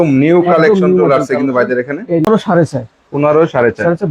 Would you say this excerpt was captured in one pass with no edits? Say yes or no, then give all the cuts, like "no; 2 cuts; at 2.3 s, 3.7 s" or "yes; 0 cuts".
no; 1 cut; at 2.3 s